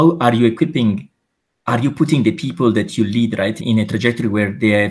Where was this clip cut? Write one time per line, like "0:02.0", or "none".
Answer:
none